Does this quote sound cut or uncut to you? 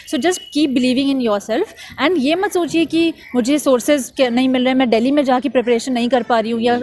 uncut